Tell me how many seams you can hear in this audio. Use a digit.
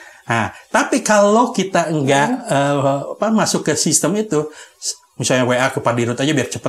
0